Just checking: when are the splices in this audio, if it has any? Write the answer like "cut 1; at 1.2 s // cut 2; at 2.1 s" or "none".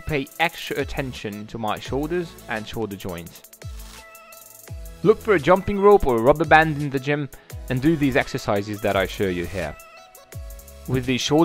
cut 1; at 3.2 s